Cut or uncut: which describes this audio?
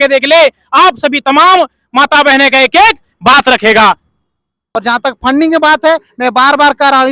cut